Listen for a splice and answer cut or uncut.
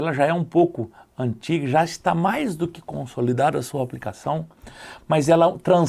uncut